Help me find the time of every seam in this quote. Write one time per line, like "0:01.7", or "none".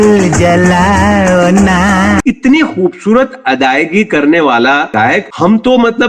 0:02.2